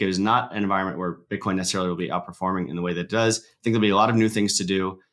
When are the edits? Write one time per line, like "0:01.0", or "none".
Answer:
none